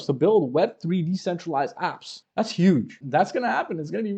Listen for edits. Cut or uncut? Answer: cut